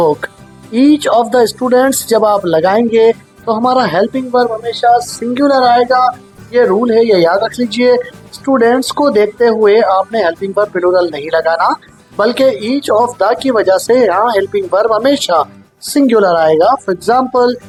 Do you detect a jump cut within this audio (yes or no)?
no